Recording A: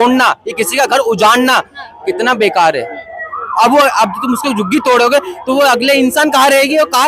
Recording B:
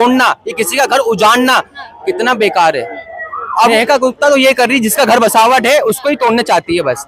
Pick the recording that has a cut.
B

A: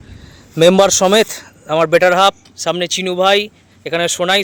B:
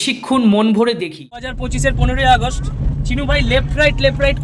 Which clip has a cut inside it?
B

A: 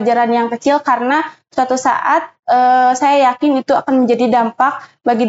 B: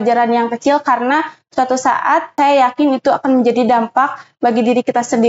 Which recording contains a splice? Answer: B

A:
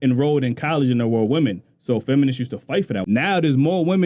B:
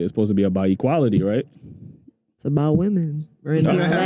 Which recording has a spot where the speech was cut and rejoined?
A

